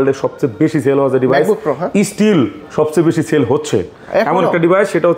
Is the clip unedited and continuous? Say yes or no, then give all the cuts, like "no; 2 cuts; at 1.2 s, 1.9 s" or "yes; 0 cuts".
yes; 0 cuts